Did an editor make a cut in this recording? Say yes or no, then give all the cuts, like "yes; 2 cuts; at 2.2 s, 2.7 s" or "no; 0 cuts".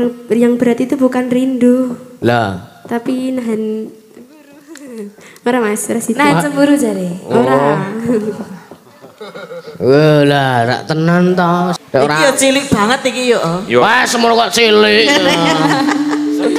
yes; 1 cut; at 11.8 s